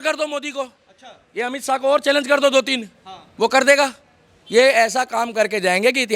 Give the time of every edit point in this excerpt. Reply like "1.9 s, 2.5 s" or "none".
none